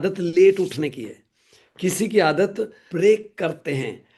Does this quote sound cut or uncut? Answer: cut